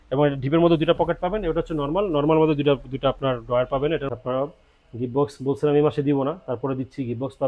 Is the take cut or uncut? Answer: cut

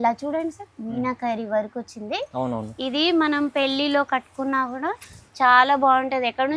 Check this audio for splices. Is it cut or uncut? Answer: uncut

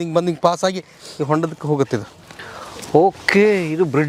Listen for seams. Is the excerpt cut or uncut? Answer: uncut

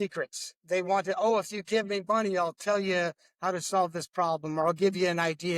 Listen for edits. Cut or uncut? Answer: uncut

